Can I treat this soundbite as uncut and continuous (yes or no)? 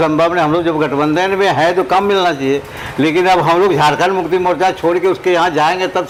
yes